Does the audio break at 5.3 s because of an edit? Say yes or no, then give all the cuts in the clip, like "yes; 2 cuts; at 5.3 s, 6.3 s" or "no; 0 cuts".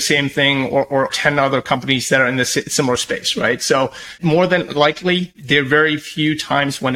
yes; 3 cuts; at 1.1 s, 4.1 s, 5.3 s